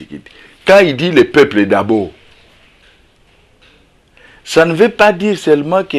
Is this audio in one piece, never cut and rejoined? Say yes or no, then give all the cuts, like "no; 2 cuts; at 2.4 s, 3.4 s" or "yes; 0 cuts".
yes; 0 cuts